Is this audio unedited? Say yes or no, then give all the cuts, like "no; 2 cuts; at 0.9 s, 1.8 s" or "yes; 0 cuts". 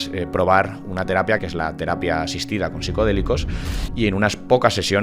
no; 1 cut; at 1.4 s